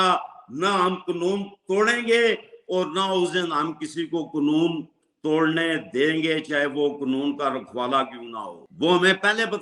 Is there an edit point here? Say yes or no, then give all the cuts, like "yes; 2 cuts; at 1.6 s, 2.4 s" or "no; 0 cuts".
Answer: yes; 1 cut; at 8.6 s